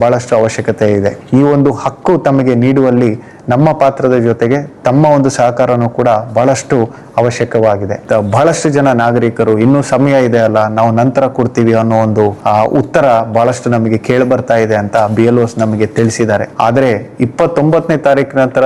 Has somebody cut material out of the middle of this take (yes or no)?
yes